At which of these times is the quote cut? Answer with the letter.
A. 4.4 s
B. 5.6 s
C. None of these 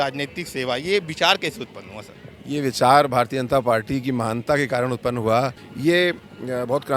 B